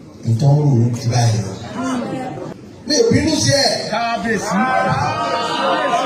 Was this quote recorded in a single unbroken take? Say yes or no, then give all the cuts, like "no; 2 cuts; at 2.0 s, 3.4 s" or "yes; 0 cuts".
no; 1 cut; at 2.6 s